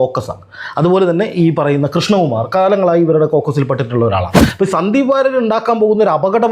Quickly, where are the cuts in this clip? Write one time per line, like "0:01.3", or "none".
0:04.4